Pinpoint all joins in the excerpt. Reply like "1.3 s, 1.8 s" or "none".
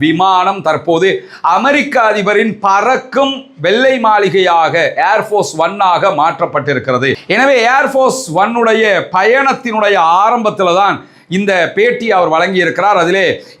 none